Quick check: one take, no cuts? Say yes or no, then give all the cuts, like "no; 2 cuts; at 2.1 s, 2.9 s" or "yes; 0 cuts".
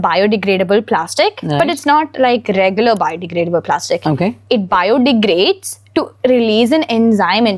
yes; 0 cuts